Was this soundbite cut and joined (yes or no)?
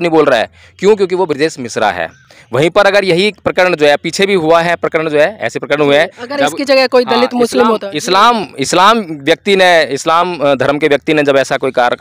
no